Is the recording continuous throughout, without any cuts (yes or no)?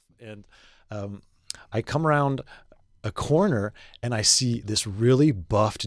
yes